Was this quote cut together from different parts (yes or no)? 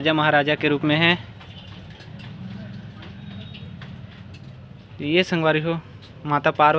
no